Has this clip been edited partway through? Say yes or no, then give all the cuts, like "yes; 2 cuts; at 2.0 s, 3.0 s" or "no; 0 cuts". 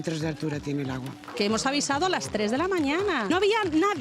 yes; 1 cut; at 1.2 s